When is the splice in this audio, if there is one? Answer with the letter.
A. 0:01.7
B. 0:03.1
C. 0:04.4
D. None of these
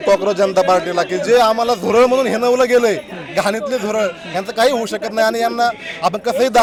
D